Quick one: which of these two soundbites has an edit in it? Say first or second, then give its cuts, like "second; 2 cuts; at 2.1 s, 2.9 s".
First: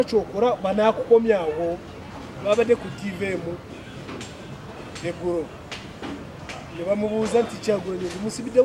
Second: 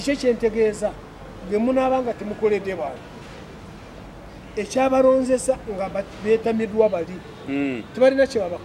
first; 1 cut; at 1.9 s